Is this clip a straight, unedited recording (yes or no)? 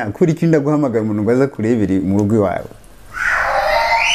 yes